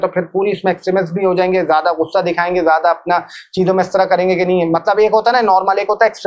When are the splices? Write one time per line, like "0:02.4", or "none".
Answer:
none